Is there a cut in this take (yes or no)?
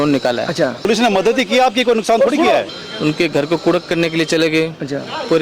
yes